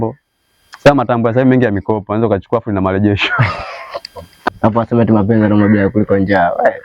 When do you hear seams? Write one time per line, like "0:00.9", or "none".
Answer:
0:04.5